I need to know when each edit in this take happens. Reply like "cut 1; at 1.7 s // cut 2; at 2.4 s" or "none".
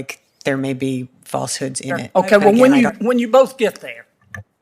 cut 1; at 1.9 s